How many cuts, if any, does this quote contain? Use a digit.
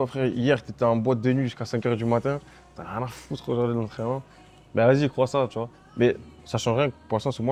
0